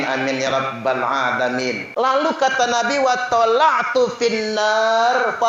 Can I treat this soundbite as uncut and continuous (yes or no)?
no